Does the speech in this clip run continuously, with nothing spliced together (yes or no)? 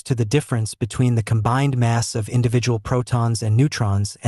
yes